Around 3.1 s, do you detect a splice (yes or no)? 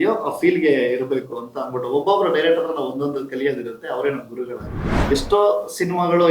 no